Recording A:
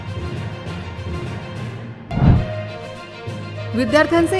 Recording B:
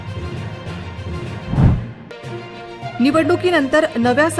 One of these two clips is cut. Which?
B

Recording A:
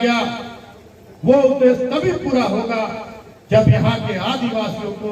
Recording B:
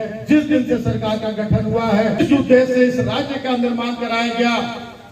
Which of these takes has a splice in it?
B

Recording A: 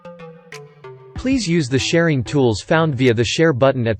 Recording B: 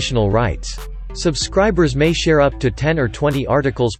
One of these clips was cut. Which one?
A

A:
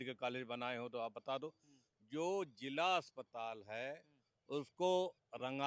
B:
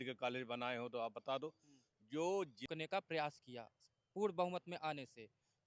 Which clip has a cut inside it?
B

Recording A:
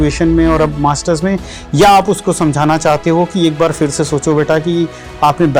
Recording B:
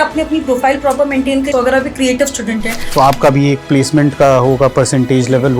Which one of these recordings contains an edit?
B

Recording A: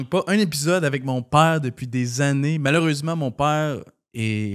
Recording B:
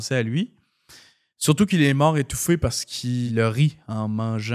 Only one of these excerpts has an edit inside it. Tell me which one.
B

